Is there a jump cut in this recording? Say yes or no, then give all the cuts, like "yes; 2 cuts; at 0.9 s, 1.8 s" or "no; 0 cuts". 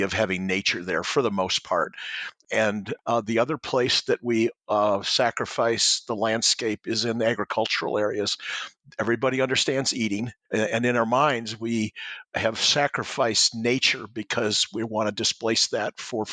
yes; 2 cuts; at 2.5 s, 10.4 s